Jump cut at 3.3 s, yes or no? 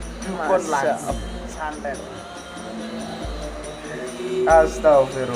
no